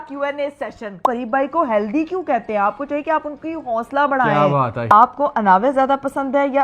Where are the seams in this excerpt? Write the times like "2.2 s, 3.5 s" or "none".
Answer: 1.0 s, 4.8 s